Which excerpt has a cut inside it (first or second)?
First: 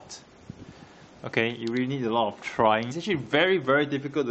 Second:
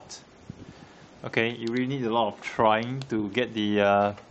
second